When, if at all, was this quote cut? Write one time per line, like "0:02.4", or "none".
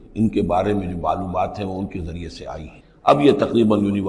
none